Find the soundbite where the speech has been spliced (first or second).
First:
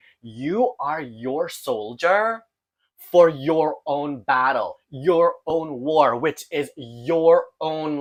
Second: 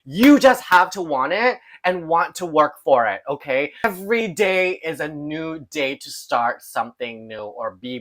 second